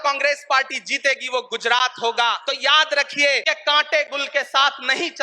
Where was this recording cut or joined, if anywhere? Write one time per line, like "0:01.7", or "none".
0:02.4
0:03.4